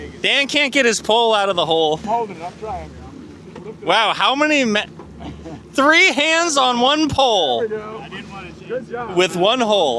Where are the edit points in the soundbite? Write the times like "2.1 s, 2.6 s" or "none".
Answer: 2.0 s